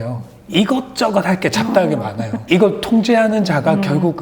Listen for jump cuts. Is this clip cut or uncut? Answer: cut